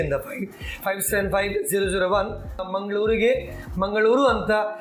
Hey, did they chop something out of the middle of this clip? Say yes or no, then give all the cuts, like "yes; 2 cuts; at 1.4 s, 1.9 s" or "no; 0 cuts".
yes; 1 cut; at 2.7 s